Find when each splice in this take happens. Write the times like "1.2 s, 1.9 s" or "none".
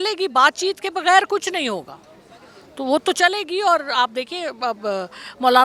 none